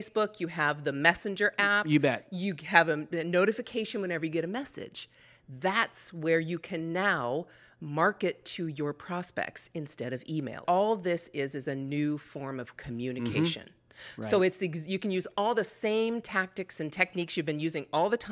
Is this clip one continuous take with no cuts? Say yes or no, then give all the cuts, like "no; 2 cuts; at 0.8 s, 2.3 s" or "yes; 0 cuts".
no; 1 cut; at 10.6 s